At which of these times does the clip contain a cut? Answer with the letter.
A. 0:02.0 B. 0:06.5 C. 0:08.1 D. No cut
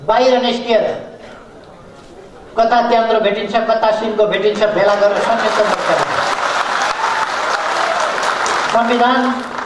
D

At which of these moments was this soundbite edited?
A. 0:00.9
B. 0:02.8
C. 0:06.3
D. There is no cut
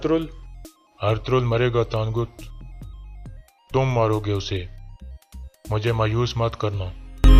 D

